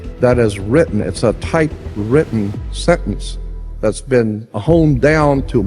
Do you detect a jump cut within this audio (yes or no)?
yes